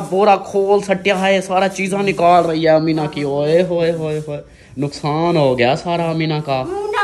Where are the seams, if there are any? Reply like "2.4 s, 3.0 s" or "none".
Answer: none